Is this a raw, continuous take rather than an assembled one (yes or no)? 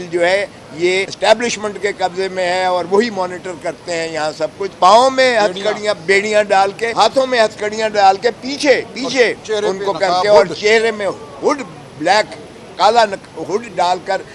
no